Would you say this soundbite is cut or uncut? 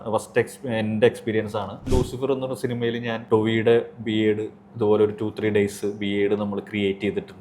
cut